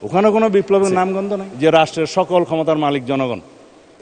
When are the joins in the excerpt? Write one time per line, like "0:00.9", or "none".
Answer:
0:01.5

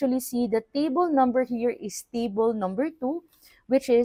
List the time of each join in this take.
none

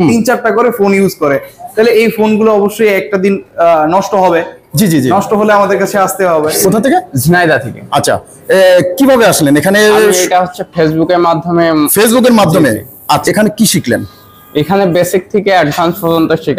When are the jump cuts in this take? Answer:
0:06.5
0:13.2

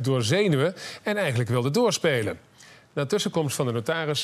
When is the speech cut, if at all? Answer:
0:01.3

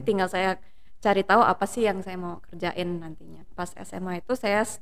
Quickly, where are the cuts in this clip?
0:03.5

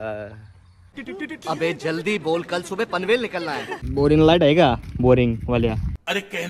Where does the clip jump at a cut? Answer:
0:03.8

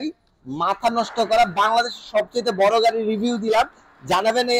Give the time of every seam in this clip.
none

